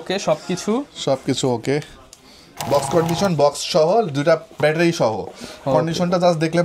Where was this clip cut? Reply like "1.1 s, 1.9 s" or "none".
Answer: 2.7 s